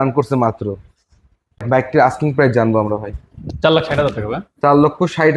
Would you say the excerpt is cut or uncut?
cut